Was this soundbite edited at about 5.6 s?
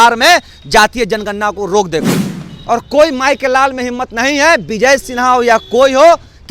no; 1 cut; at 2.5 s

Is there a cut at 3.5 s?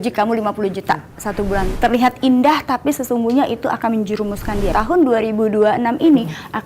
no; 2 cuts; at 1.7 s, 4.7 s

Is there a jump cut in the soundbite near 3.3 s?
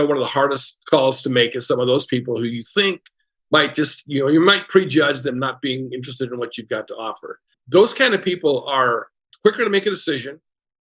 no; 2 cuts; at 7.5 s, 9.2 s

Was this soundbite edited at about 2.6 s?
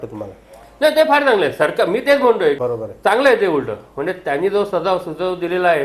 yes; 1 cut; at 2.6 s

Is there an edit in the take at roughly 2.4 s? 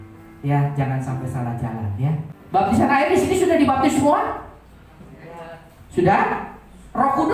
yes; 1 cut; at 2.4 s

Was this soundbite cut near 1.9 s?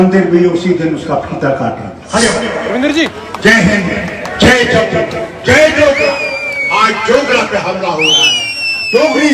yes; 1 cut; at 1.9 s

